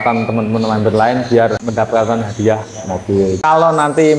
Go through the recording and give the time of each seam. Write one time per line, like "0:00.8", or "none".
0:01.6
0:03.4